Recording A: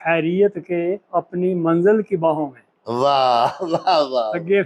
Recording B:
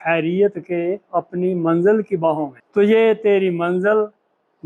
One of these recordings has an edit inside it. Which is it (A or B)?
B